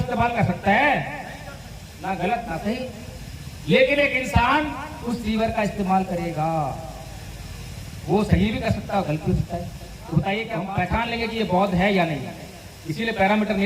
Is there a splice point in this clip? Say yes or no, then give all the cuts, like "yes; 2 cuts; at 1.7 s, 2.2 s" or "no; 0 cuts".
yes; 1 cut; at 10.6 s